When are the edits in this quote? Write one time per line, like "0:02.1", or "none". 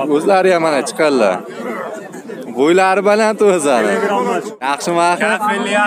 0:04.5